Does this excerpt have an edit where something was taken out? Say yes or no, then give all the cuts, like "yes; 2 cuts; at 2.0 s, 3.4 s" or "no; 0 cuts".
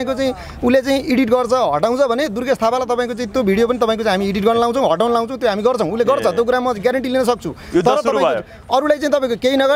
no; 0 cuts